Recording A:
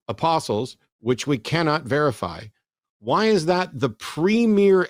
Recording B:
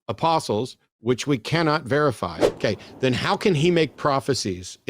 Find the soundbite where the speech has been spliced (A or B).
B